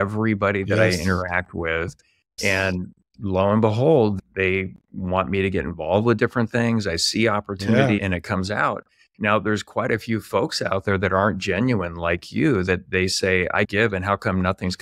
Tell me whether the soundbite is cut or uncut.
cut